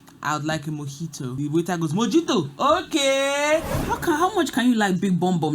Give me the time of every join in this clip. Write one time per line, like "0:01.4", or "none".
0:01.4
0:03.7